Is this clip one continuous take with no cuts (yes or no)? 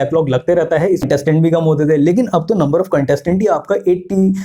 no